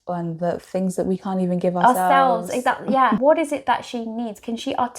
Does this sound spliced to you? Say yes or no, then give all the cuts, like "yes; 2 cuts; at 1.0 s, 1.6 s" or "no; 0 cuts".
yes; 1 cut; at 3.2 s